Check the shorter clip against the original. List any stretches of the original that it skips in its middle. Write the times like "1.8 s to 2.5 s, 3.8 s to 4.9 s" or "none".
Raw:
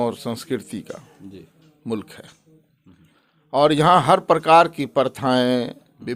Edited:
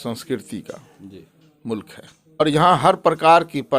2.6 s to 3.7 s